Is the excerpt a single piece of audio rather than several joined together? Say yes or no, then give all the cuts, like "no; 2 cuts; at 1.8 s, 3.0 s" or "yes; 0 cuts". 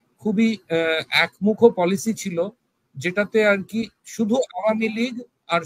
yes; 0 cuts